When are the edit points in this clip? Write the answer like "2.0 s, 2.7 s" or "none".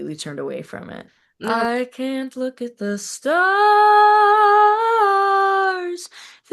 1.5 s